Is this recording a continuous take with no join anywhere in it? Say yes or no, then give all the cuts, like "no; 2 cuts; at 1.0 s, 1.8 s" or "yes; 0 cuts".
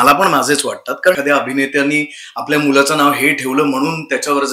no; 1 cut; at 1.2 s